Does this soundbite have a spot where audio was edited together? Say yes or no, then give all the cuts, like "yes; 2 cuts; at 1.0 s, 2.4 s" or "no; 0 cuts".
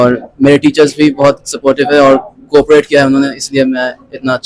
no; 0 cuts